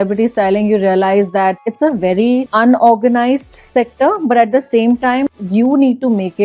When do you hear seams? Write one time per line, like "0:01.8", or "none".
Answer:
0:01.6
0:02.5
0:05.2